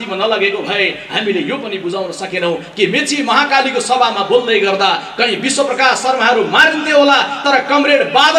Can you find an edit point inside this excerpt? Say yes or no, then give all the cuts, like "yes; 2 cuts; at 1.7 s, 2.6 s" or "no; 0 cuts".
no; 0 cuts